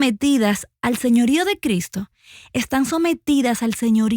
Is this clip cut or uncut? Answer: uncut